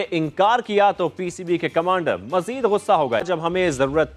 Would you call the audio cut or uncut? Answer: cut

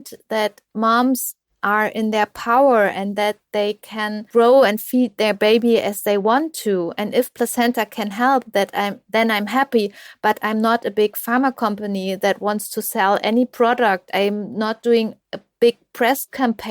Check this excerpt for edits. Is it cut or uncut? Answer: cut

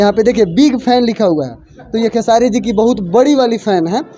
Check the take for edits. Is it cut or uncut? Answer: uncut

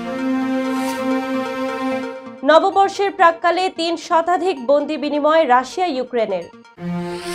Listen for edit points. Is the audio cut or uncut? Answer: uncut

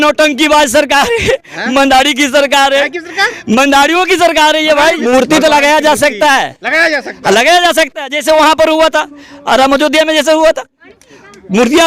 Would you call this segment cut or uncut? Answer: cut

